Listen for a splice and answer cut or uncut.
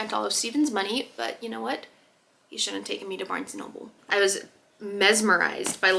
cut